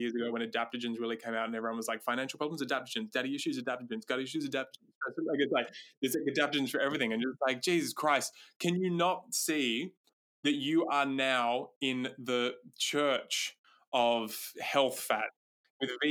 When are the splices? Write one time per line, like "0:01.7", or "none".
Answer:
none